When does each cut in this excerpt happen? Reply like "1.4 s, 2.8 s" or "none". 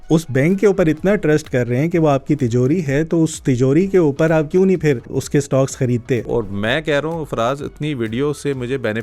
5.1 s, 6.3 s